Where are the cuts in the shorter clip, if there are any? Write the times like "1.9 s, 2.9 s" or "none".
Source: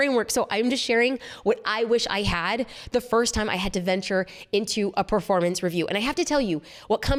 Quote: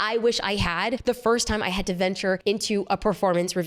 1.0 s, 2.4 s